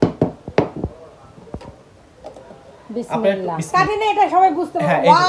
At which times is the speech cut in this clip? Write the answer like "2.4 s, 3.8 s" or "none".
3.6 s